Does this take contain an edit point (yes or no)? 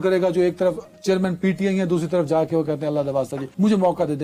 no